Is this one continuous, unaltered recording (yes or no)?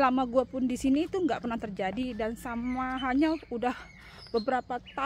yes